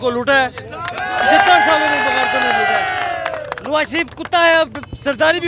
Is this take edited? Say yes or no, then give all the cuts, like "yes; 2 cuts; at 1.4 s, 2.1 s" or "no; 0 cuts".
no; 0 cuts